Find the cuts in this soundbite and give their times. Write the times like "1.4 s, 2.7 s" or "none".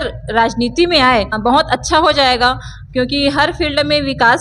1.4 s